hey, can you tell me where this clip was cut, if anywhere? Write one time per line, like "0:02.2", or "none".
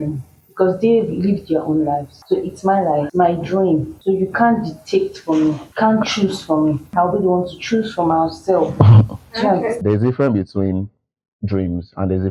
0:02.1
0:03.1
0:03.9
0:05.7
0:06.8
0:09.8